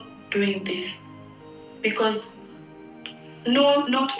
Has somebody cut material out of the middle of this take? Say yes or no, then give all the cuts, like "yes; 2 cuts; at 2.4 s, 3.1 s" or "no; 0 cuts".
no; 0 cuts